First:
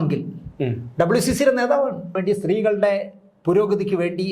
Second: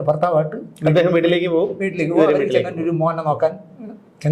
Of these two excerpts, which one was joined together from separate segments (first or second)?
first